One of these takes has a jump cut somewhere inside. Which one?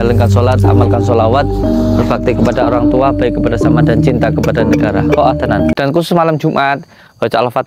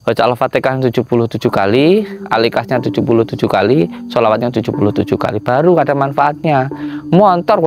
first; 1 cut; at 5.7 s

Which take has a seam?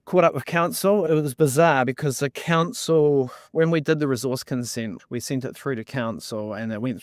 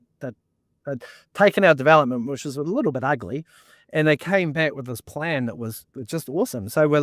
first; 2 cuts; at 1.0 s, 5.0 s

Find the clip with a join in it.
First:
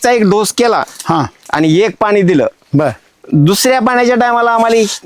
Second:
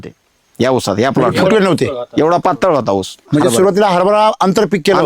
second; 1 cut; at 3.2 s

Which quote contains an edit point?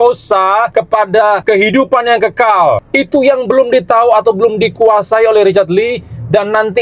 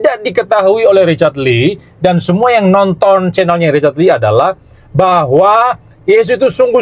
first; 2 cuts; at 1.2 s, 2.9 s

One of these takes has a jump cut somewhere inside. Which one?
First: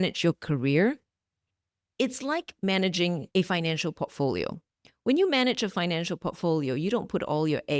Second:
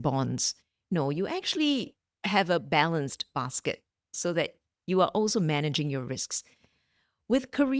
first; 1 cut; at 3.2 s

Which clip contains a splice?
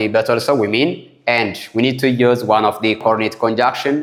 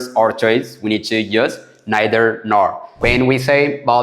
second; 1 cut; at 3.0 s

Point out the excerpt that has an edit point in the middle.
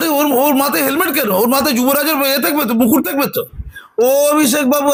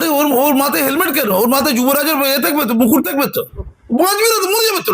second; 1 cut; at 3.8 s

